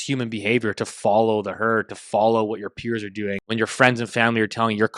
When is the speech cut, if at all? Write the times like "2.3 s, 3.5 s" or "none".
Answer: 3.5 s